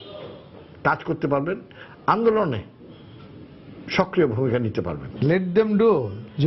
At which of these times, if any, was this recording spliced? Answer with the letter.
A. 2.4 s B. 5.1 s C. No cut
C